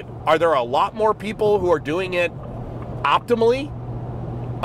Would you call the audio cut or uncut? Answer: uncut